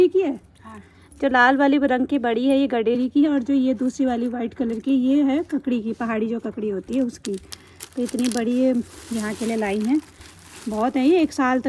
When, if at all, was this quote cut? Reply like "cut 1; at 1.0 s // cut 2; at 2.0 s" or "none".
none